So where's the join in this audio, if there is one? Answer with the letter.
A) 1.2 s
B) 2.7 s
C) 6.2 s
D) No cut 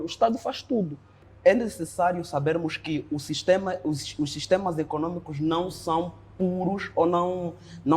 A